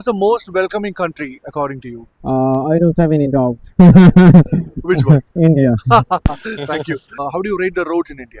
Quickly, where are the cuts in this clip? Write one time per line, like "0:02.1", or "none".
0:07.2